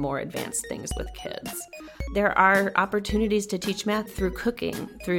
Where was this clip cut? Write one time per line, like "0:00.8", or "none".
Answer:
0:02.1
0:04.1